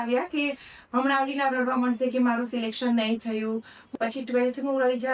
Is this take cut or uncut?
cut